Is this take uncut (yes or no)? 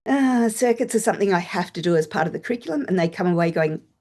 yes